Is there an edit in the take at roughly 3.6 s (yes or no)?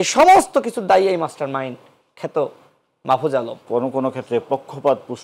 yes